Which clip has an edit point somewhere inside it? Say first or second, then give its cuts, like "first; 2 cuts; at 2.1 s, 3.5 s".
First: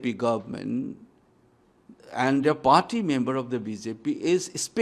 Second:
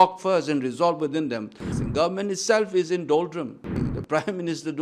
second; 2 cuts; at 1.7 s, 3.8 s